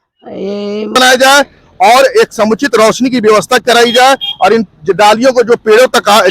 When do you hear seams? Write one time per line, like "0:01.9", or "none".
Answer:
0:01.0